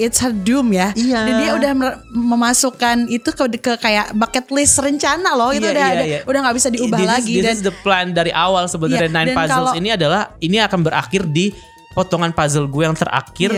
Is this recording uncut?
yes; 0 cuts

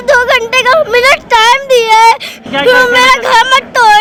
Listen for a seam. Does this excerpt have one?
no; 0 cuts

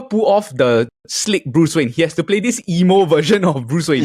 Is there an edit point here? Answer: no; 0 cuts

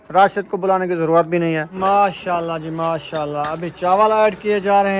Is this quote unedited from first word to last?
no; 1 cut; at 1.7 s

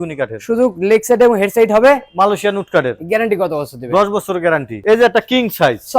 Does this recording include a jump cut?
yes; 1 cut; at 4.7 s

